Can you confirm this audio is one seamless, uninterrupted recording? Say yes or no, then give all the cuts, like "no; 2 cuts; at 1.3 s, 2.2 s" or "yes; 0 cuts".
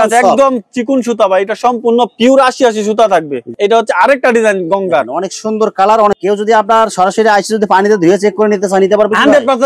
no; 2 cuts; at 3.4 s, 6.2 s